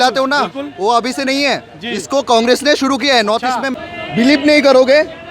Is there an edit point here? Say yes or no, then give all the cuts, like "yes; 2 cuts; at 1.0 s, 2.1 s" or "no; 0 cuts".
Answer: yes; 1 cut; at 3.7 s